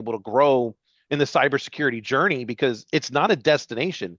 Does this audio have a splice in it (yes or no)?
no